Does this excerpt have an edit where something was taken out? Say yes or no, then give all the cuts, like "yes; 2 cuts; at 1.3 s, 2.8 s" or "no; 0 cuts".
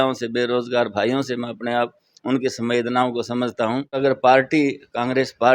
yes; 1 cut; at 3.8 s